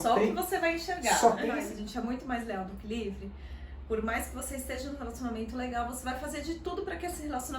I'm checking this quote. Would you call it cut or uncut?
cut